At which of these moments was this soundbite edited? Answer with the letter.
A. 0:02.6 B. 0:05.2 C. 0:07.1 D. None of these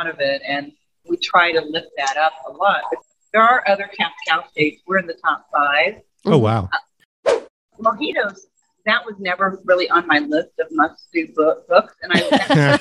C